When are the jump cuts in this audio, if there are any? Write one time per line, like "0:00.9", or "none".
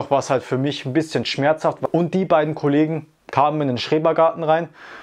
0:01.9